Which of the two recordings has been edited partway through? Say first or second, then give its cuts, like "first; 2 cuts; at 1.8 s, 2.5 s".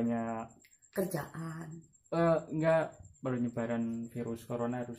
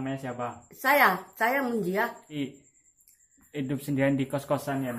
second; 1 cut; at 2.4 s